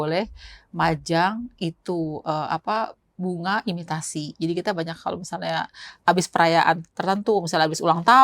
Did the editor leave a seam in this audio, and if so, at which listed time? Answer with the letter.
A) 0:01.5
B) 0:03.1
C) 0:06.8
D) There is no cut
D